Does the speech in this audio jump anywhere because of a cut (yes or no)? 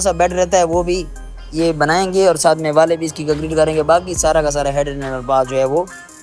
no